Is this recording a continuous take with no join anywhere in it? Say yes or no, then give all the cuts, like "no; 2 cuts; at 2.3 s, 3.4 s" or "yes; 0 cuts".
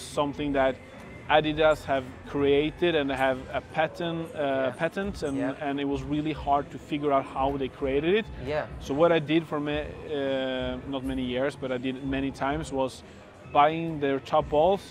yes; 0 cuts